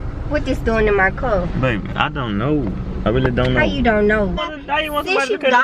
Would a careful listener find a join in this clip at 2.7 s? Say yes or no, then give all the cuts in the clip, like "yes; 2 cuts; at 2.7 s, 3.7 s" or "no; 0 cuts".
no; 1 cut; at 4.3 s